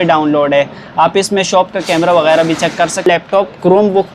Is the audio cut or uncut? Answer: cut